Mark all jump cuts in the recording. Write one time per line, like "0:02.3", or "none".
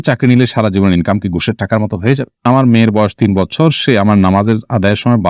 0:02.5